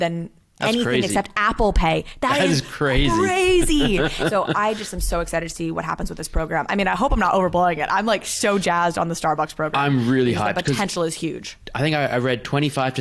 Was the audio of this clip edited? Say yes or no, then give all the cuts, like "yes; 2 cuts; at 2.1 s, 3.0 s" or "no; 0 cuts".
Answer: yes; 3 cuts; at 4.0 s, 9.7 s, 11.1 s